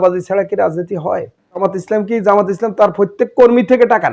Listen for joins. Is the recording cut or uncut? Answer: cut